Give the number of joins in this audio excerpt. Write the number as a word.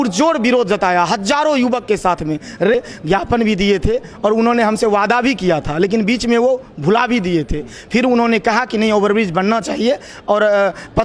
one